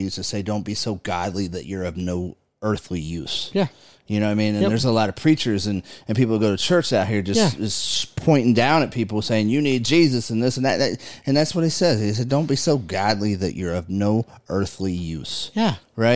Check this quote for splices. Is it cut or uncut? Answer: uncut